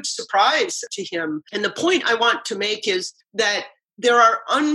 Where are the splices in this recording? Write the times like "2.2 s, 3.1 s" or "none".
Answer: 1.0 s, 3.5 s